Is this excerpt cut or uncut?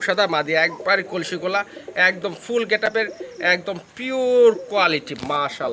uncut